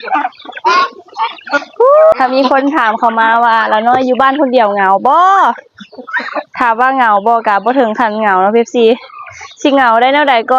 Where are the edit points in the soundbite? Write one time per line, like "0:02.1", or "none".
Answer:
0:02.1